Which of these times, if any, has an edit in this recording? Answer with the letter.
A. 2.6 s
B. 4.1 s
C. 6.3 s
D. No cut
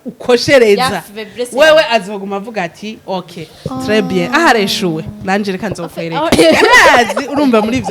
C